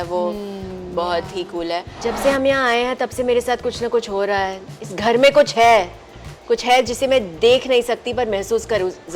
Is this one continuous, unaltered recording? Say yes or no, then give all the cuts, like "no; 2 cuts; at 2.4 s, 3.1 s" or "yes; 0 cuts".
no; 1 cut; at 1.9 s